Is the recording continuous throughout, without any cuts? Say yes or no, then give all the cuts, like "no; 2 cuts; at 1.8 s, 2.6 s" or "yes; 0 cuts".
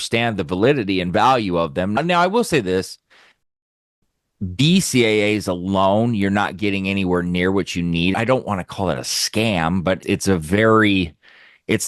no; 2 cuts; at 8.1 s, 10.0 s